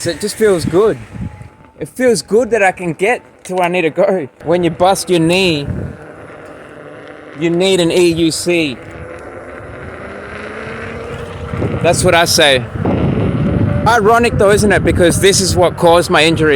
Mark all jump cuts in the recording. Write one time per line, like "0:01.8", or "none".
0:04.3
0:12.8